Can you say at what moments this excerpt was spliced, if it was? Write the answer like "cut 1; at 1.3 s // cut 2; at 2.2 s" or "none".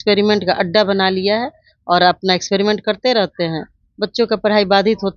none